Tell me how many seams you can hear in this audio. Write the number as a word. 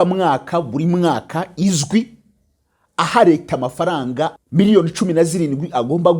one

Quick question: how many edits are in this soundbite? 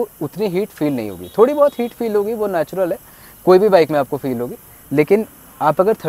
zero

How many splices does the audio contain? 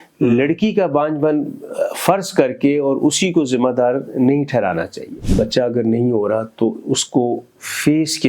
one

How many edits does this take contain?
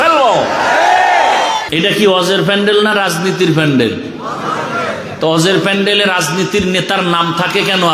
one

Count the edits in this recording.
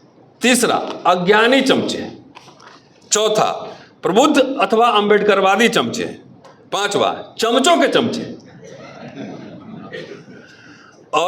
zero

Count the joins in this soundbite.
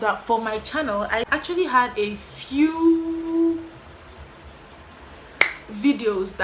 one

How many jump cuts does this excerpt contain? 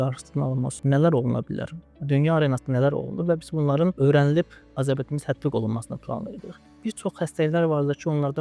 two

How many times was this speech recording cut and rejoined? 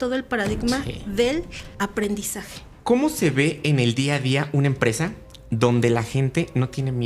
two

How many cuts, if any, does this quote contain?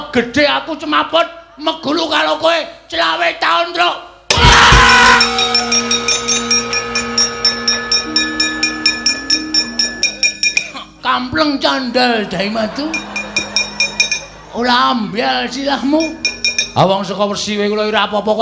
one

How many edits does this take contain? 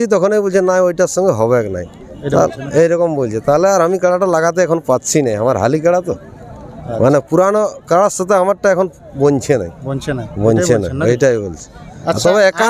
zero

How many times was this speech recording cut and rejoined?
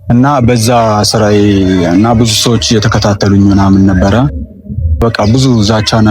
one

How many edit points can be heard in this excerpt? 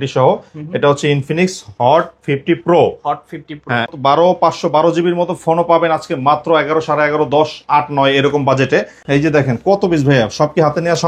two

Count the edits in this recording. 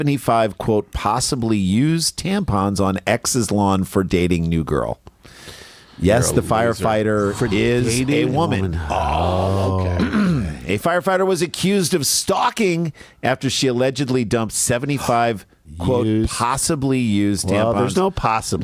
zero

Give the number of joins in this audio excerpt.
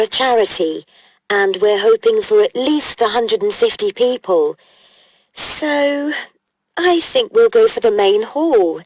zero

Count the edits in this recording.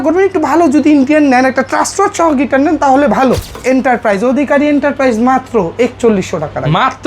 one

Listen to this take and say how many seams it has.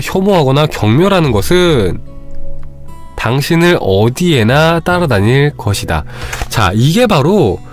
zero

